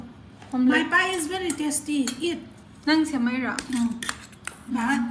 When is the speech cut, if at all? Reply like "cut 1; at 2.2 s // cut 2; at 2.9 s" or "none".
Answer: none